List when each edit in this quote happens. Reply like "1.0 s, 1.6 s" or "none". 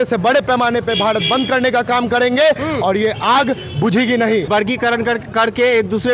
4.5 s